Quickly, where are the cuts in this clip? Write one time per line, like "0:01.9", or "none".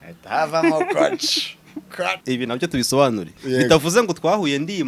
0:02.2